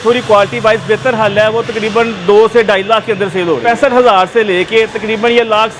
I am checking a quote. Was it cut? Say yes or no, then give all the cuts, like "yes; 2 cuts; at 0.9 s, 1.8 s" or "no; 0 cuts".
no; 0 cuts